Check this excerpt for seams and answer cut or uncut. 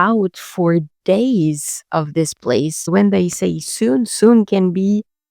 cut